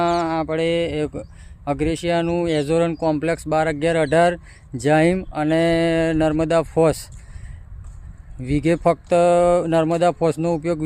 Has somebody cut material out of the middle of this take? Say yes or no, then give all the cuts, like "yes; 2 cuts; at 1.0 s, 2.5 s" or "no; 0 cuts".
no; 0 cuts